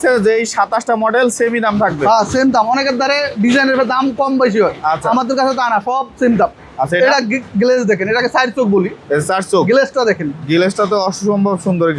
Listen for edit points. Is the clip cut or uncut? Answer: uncut